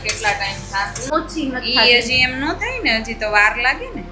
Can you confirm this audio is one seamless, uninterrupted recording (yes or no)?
no